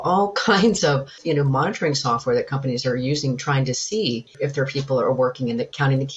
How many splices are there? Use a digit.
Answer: 2